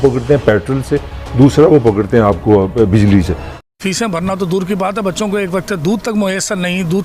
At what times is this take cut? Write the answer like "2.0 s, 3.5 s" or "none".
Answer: 3.4 s